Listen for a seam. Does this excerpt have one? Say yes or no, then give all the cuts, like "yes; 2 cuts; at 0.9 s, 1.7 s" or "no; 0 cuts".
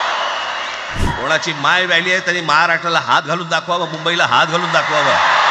yes; 1 cut; at 1.1 s